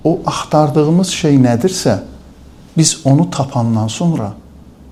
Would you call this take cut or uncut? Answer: uncut